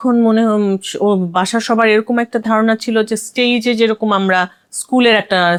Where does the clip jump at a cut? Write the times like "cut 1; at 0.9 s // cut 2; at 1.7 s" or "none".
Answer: none

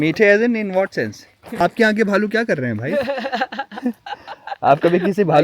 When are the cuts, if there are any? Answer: cut 1; at 1.6 s

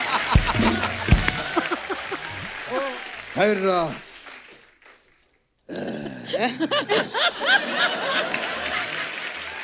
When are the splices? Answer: cut 1; at 2.9 s

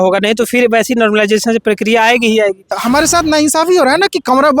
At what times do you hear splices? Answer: cut 1; at 2.8 s

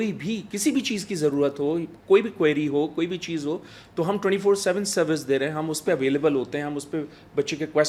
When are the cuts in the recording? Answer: none

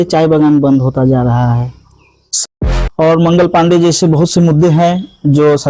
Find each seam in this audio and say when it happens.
cut 1; at 2.4 s

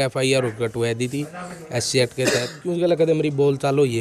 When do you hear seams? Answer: cut 1; at 2.6 s

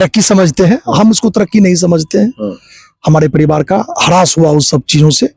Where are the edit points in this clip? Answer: none

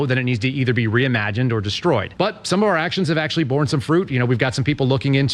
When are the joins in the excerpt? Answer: cut 1; at 2.1 s

